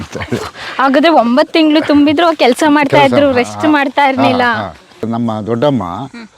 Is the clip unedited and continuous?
no; 1 cut; at 5.0 s

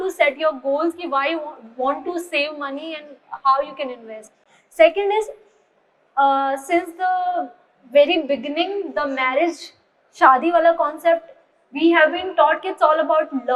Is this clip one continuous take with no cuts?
yes; 0 cuts

